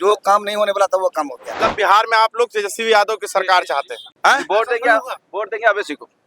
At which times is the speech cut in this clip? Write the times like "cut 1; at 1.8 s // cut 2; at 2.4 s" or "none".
cut 1; at 1.5 s // cut 2; at 4.0 s